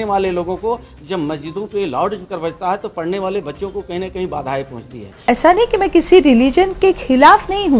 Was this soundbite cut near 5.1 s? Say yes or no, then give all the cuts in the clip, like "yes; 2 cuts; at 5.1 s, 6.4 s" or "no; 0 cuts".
yes; 1 cut; at 5.1 s